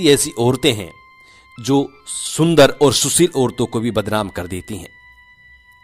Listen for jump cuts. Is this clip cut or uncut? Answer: uncut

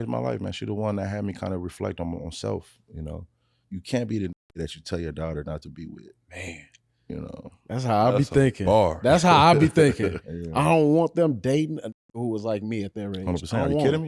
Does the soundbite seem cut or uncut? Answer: cut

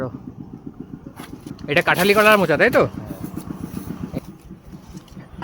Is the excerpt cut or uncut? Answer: cut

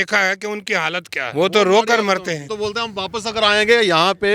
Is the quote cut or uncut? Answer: cut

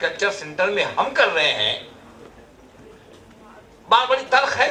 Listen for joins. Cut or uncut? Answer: uncut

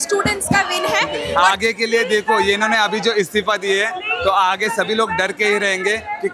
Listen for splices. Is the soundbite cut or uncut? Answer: cut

